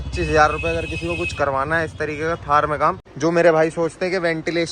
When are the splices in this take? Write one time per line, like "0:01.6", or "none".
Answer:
0:03.1